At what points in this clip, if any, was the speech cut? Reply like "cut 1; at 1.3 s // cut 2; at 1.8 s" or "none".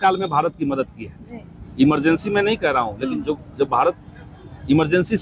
none